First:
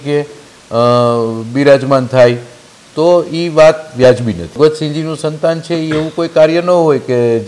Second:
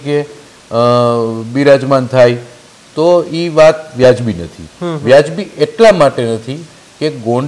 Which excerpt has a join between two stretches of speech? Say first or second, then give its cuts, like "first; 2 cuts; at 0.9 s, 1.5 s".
first; 1 cut; at 4.6 s